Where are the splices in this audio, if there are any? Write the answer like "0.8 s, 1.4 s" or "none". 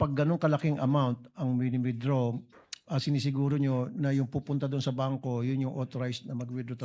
none